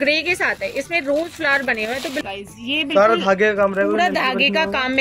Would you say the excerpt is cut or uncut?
cut